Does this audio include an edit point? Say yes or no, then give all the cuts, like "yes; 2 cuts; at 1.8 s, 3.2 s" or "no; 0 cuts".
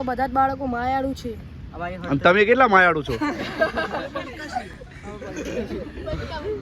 no; 0 cuts